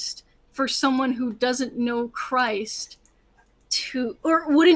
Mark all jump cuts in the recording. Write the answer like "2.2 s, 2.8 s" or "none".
none